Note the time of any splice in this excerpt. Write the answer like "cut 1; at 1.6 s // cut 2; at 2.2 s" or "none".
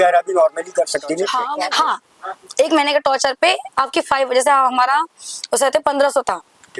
cut 1; at 1.4 s